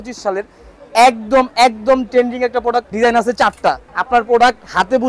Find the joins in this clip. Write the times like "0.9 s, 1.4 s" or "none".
2.9 s, 3.9 s